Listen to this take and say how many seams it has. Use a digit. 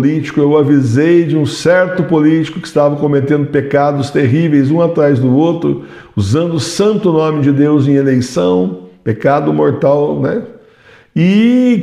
0